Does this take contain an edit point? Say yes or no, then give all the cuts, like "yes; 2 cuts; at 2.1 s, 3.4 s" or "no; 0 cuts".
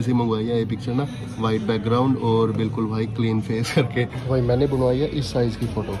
no; 0 cuts